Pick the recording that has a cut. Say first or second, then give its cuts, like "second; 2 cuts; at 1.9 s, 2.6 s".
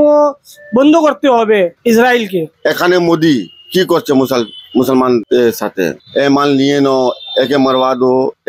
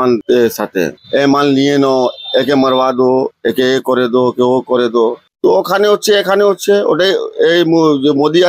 first; 1 cut; at 2.5 s